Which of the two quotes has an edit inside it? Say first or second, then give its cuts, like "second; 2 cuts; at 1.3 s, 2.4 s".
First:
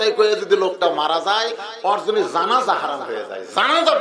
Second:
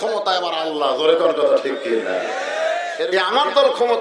second; 1 cut; at 3.0 s